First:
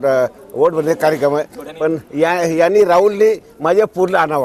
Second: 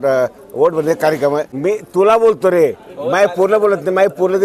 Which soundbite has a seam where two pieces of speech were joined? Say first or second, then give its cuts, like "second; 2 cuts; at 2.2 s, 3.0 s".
second; 1 cut; at 1.5 s